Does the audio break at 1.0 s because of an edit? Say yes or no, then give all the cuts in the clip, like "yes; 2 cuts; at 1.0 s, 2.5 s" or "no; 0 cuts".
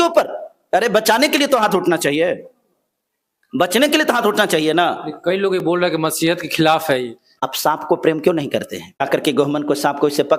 no; 2 cuts; at 7.5 s, 9.0 s